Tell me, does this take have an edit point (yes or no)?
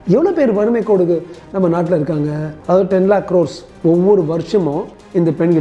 yes